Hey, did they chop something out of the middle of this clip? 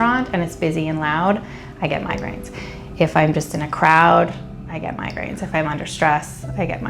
no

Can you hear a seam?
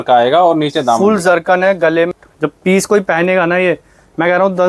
yes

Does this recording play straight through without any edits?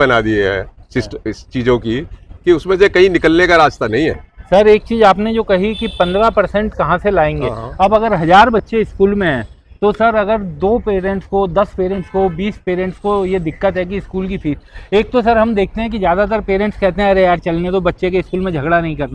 yes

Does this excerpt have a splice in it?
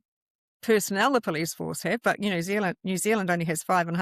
no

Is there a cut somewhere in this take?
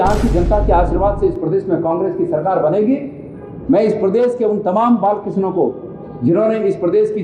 no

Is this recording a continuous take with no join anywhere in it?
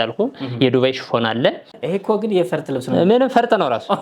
no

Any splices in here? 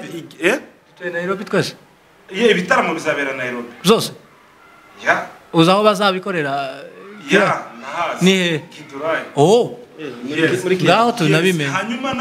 no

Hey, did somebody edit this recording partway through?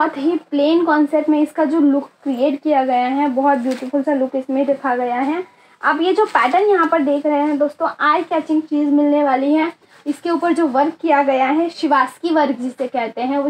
no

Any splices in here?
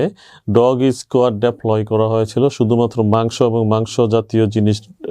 no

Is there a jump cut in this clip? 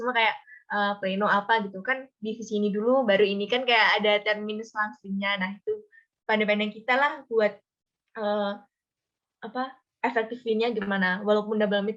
no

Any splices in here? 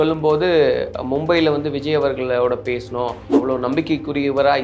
yes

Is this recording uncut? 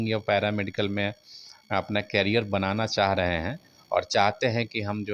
yes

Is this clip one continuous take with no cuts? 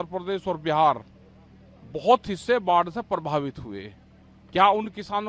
yes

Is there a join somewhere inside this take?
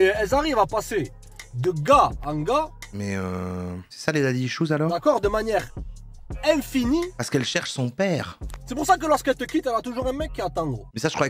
no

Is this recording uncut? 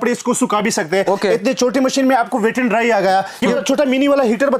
no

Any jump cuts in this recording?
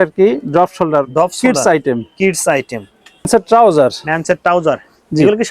yes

